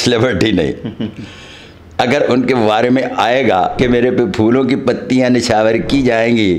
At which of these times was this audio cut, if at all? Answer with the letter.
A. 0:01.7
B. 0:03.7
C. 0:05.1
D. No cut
B